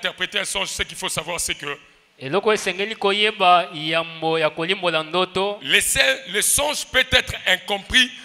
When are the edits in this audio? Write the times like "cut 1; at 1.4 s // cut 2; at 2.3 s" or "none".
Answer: none